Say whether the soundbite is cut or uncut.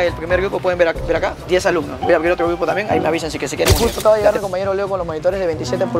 cut